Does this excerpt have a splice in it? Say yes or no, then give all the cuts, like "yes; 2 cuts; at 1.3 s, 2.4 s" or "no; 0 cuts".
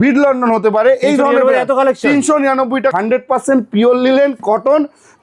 yes; 1 cut; at 2.9 s